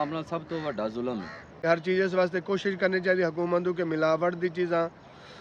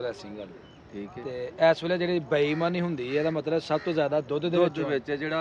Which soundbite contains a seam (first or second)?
first